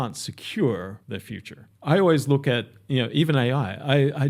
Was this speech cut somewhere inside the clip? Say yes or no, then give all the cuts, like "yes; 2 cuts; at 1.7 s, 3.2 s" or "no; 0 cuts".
yes; 1 cut; at 1.3 s